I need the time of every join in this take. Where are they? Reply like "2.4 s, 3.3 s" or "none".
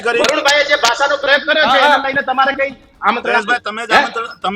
2.9 s